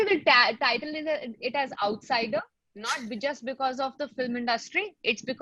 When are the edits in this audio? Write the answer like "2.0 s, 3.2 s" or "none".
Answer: none